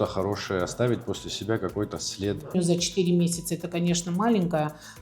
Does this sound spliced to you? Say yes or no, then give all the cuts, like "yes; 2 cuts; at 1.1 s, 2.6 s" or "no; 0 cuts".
yes; 1 cut; at 2.5 s